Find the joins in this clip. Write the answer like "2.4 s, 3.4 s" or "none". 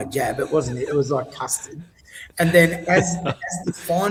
none